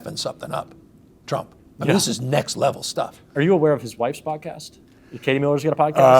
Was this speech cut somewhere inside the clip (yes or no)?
yes